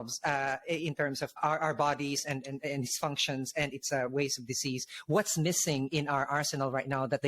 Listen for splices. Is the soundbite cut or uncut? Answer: cut